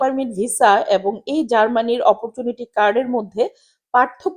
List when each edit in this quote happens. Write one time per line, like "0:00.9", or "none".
none